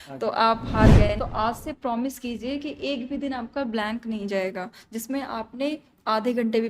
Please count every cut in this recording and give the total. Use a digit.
1